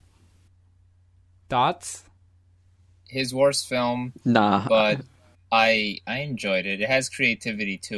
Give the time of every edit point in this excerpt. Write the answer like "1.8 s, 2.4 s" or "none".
1.3 s